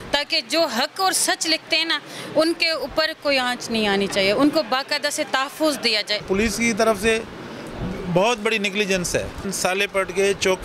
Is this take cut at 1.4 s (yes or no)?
no